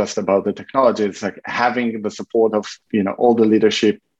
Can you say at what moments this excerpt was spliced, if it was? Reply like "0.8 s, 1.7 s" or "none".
2.8 s